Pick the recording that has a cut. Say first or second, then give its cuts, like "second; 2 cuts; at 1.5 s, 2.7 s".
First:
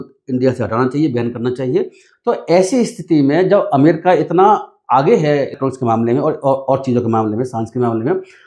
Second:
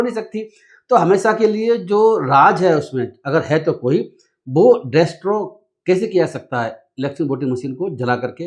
first; 2 cuts; at 2.0 s, 5.5 s